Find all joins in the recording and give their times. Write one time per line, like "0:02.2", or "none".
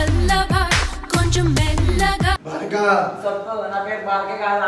none